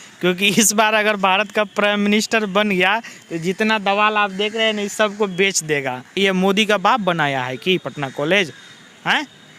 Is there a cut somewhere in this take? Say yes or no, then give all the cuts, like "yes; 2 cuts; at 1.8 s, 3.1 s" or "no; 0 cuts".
yes; 1 cut; at 6.1 s